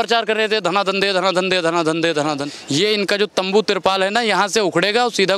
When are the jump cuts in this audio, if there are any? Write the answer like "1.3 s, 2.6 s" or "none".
2.5 s

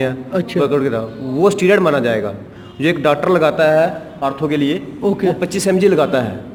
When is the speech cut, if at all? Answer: none

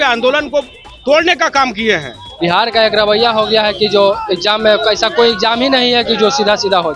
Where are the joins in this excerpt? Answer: 2.3 s

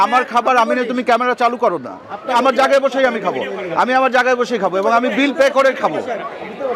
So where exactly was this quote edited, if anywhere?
2.3 s

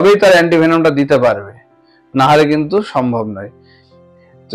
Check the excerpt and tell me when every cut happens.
none

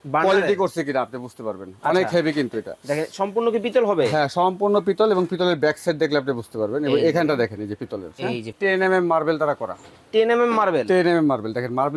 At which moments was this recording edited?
8.5 s

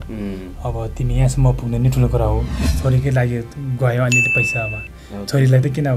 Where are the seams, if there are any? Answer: 2.6 s

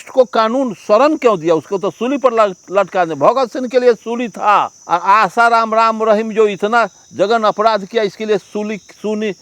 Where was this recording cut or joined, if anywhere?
4.8 s

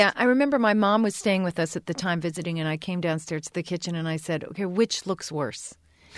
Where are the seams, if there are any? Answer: none

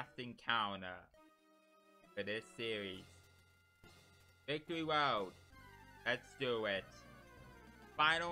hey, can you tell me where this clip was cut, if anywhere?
none

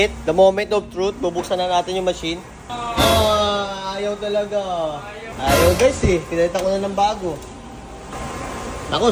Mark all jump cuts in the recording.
2.6 s, 5.2 s

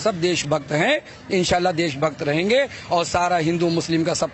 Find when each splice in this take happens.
none

